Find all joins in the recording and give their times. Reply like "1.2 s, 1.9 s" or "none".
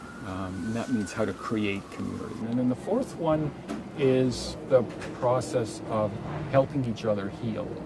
2.4 s, 4.6 s